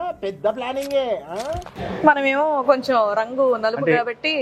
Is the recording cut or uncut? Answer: cut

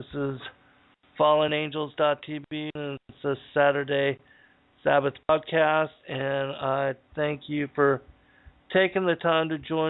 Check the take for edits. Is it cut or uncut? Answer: cut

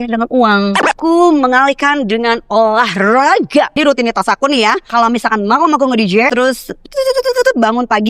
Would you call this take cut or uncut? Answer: cut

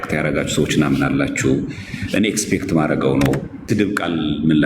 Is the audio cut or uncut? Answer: cut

